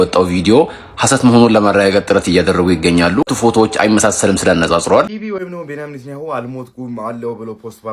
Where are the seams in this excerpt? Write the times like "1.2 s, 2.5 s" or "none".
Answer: 3.3 s, 5.2 s